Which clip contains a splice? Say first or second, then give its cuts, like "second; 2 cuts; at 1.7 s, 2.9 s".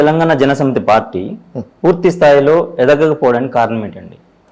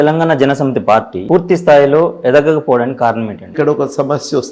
second; 2 cuts; at 1.2 s, 3.5 s